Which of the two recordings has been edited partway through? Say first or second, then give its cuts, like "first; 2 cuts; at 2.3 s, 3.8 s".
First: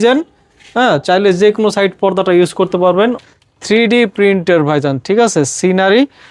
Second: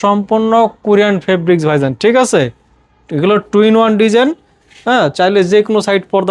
first; 1 cut; at 3.2 s